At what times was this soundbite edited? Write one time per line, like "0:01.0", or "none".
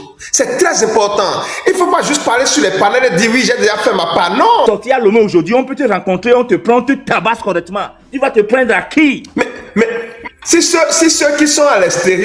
0:04.6